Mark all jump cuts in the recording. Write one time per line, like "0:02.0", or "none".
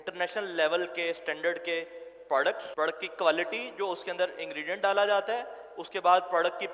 0:02.6